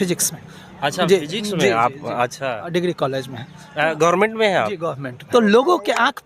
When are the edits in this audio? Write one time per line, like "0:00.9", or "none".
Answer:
0:05.2

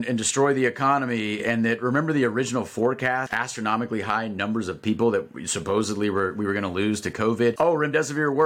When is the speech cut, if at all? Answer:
0:03.3
0:07.6

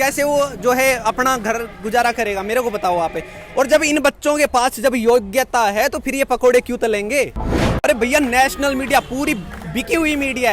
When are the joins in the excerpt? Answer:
0:07.7

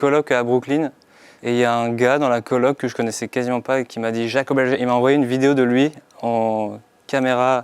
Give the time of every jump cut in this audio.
none

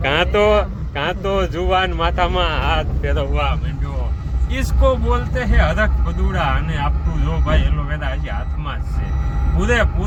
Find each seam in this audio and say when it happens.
none

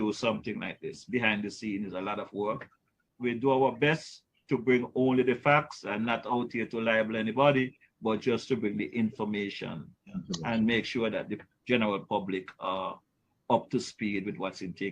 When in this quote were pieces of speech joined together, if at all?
0:03.1

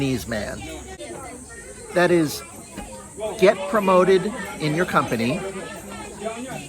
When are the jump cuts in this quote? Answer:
0:01.0

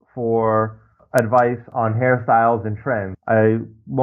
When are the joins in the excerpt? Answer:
0:01.0
0:01.7
0:03.1

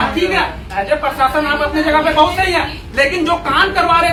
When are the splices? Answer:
none

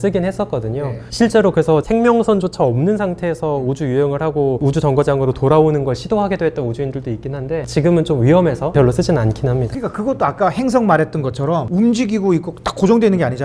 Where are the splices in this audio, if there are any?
none

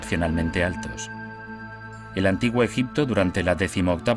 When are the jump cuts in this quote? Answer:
none

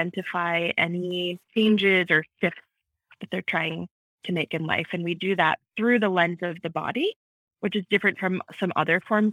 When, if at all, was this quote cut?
0:01.4

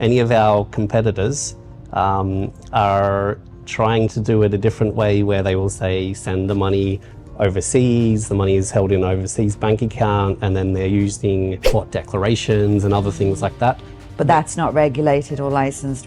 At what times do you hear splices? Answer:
0:11.6

